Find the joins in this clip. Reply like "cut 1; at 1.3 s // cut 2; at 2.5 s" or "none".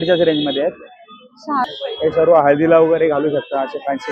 cut 1; at 1.6 s